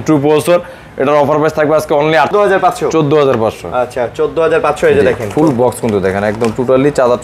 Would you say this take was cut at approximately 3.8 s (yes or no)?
no